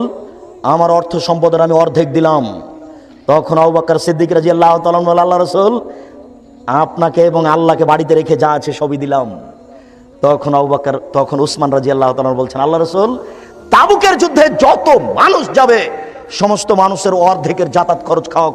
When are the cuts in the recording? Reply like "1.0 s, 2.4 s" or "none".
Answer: none